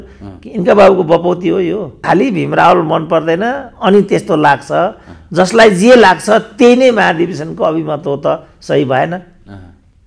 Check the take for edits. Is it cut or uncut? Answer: cut